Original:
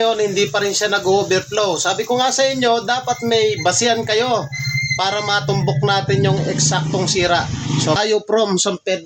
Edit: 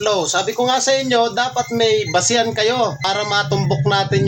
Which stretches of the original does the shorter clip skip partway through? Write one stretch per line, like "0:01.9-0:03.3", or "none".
0:04.5-0:05.0